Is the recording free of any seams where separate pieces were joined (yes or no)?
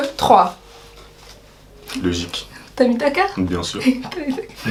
yes